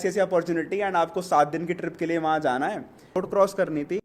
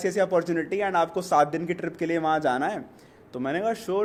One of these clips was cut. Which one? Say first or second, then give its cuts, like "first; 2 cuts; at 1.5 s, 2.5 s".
first; 1 cut; at 3.2 s